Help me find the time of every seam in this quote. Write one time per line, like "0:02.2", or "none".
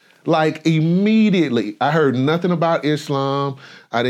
none